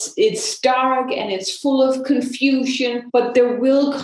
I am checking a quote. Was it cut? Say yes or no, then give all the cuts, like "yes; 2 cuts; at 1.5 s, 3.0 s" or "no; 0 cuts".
yes; 1 cut; at 3.0 s